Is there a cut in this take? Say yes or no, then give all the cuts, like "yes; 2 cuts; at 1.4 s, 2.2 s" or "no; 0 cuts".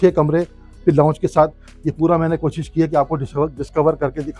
no; 0 cuts